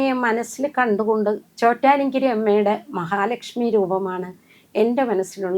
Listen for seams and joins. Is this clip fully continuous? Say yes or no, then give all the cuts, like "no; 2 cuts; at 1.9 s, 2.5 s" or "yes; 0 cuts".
no; 1 cut; at 1.5 s